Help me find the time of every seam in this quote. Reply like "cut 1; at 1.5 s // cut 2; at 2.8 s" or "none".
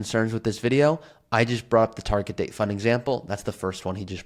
none

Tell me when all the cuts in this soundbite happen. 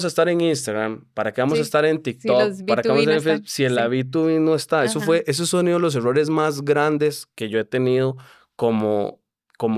none

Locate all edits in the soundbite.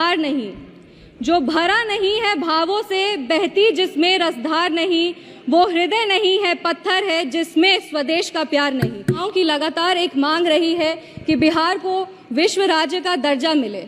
cut 1; at 9.2 s

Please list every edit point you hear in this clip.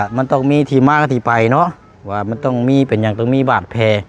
none

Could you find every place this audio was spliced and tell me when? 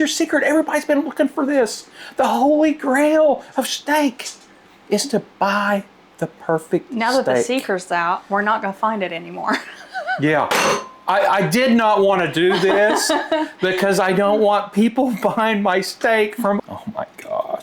cut 1; at 16.6 s

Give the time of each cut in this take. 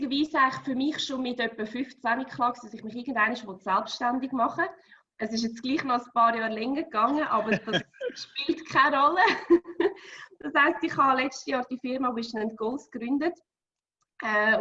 none

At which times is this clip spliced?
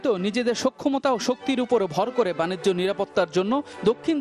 none

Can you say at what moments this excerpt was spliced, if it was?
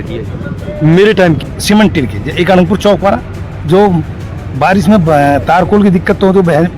cut 1; at 1.5 s

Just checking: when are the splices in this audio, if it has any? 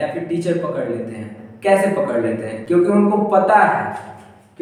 none

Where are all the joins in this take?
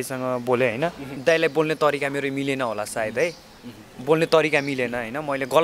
cut 1; at 1.1 s

